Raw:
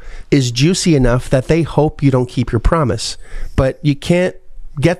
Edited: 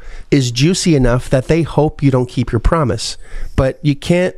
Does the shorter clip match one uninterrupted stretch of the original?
yes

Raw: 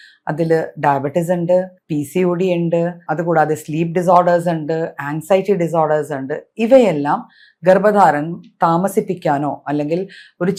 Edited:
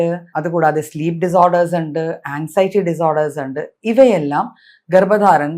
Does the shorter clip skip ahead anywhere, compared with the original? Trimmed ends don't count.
no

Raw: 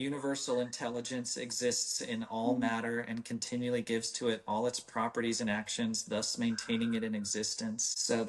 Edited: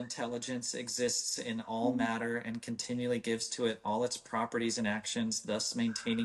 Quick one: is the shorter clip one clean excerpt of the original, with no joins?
yes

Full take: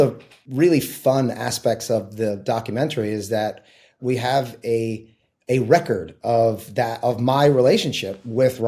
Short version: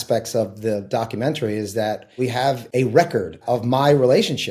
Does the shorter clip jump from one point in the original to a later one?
yes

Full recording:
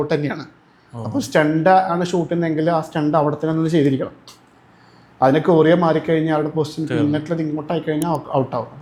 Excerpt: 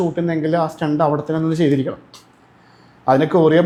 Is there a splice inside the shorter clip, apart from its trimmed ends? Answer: no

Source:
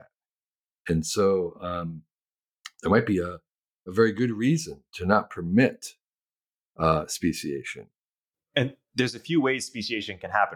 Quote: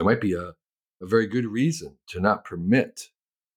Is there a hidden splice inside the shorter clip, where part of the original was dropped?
no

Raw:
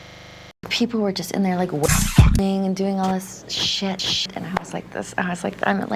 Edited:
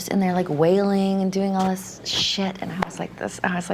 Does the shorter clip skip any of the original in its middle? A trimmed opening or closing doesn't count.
yes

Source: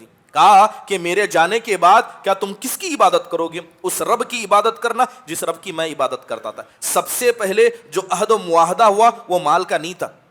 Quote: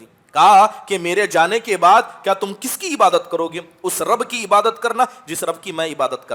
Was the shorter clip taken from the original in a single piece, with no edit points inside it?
yes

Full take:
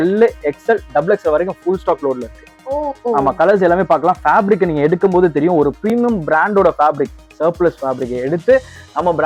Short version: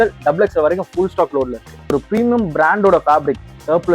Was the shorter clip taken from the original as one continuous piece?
no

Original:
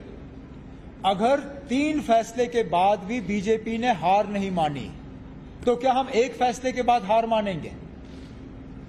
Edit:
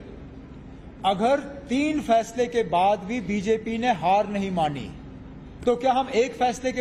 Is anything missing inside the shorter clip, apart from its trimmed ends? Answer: no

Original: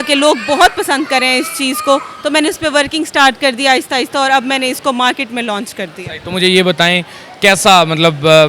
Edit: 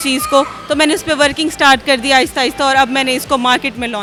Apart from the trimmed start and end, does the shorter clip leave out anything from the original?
no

